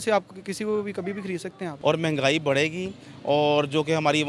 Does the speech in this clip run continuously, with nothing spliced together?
no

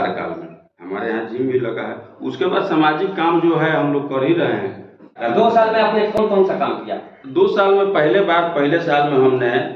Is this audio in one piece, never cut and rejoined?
no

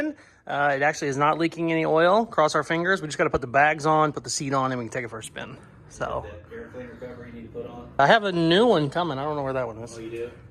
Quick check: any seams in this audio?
no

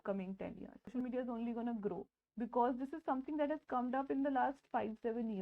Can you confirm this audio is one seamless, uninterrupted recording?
no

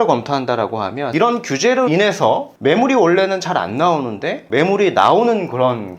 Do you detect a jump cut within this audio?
yes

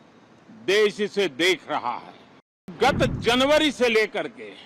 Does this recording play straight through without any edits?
no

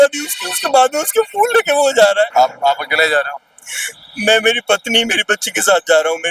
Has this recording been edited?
no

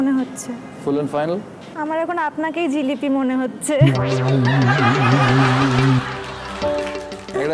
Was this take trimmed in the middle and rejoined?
yes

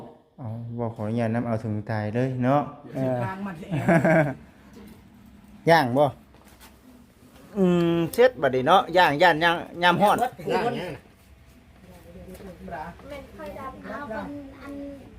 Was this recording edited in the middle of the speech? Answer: yes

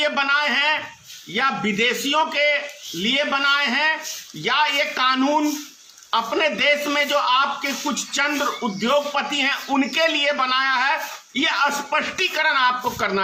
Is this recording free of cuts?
yes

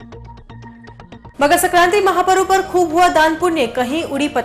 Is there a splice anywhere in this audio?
yes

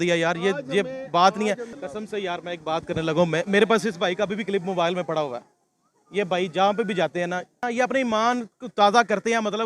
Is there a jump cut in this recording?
yes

